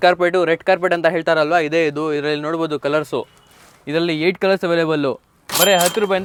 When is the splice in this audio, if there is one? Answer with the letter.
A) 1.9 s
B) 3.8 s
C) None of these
C